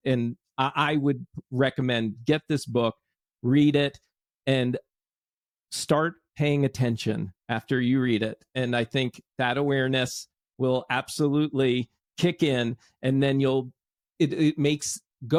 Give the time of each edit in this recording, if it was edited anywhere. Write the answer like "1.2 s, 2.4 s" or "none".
none